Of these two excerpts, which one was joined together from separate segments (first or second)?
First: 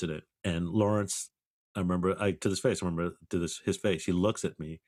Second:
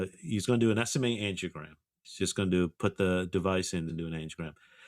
second